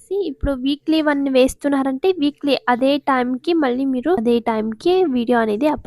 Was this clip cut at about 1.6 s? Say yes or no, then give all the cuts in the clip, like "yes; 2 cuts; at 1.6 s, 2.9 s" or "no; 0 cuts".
no; 1 cut; at 4.2 s